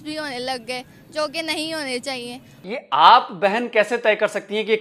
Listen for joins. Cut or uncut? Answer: cut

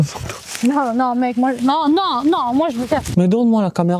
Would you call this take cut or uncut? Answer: cut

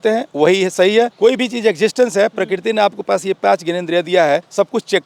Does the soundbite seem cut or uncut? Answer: cut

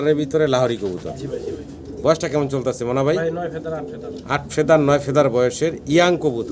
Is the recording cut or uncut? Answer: uncut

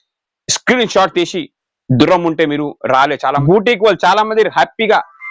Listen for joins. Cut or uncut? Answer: cut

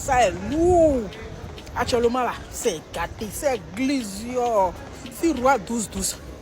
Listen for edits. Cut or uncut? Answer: uncut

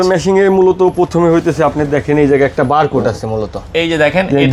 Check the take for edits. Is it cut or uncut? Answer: uncut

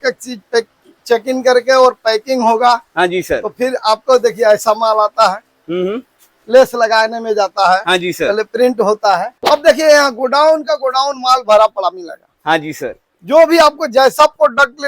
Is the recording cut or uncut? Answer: cut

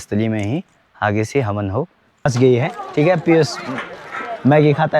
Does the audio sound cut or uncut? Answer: cut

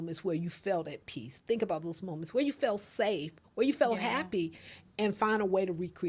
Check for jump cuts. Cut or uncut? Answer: uncut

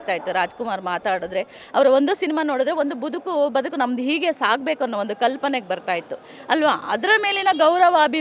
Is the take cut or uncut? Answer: uncut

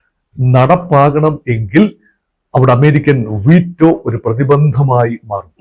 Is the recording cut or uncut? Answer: uncut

